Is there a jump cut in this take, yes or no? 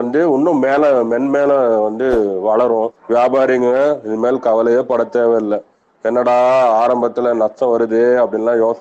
yes